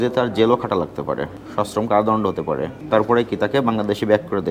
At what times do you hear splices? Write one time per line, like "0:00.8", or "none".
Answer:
0:01.4
0:02.7